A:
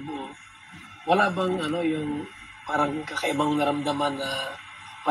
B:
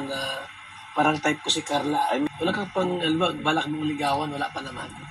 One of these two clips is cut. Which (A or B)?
B